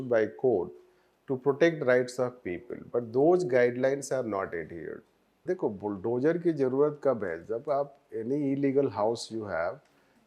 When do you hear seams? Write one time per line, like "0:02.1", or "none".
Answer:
0:05.4